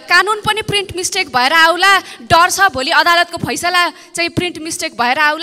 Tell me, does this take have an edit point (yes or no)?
no